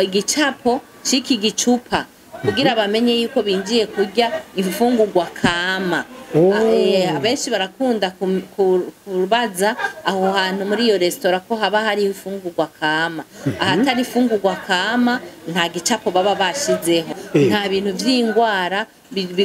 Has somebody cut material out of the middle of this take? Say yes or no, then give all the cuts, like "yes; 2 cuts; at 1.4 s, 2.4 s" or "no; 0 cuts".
yes; 1 cut; at 17.2 s